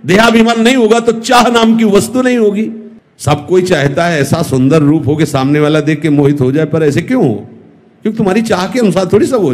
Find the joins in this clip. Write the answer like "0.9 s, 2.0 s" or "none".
2.9 s